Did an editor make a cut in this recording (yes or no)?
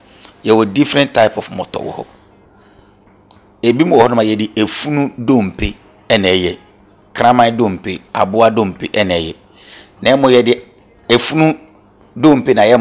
no